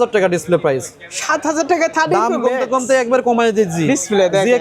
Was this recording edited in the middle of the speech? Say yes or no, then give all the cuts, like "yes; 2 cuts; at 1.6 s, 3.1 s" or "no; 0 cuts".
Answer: no; 0 cuts